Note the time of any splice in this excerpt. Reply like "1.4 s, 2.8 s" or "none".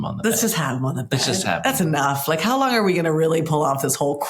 none